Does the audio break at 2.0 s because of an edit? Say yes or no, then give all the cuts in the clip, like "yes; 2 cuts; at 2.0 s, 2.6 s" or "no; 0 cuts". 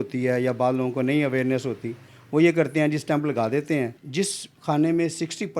no; 1 cut; at 4.0 s